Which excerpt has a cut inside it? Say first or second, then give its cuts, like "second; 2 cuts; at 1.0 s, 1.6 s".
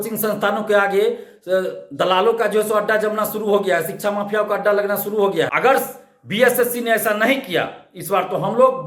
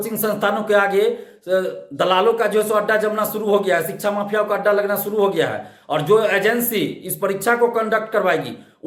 first; 1 cut; at 5.5 s